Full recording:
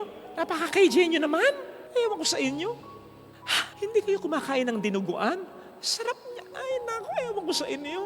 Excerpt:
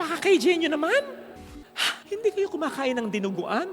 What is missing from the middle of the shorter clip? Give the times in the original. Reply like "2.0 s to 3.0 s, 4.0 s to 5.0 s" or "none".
1.7 s to 2.9 s